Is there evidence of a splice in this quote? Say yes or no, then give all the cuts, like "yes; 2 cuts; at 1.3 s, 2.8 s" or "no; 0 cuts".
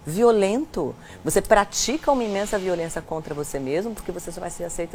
no; 0 cuts